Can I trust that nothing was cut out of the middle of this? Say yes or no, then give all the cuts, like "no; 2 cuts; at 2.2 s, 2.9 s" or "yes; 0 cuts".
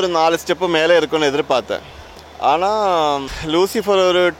yes; 0 cuts